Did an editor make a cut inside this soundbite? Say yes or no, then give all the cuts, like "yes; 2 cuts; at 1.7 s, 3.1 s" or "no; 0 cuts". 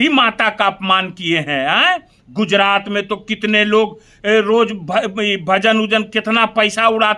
no; 0 cuts